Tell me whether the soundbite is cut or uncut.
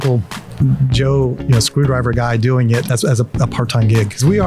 uncut